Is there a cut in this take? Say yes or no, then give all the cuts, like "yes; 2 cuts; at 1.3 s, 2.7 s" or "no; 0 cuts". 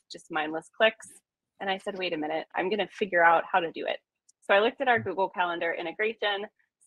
yes; 1 cut; at 2.5 s